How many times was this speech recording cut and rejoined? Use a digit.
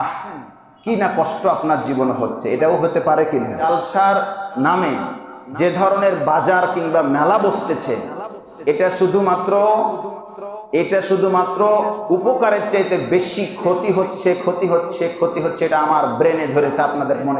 1